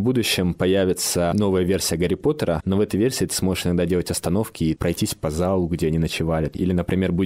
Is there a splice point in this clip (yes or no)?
yes